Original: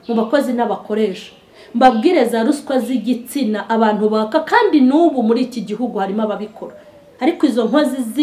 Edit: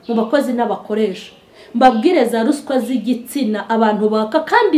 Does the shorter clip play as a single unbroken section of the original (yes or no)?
yes